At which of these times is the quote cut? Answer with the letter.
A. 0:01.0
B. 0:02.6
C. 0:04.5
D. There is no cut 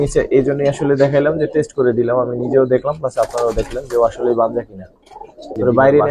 D